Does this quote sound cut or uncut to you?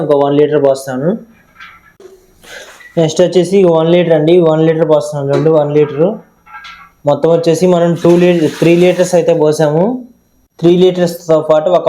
uncut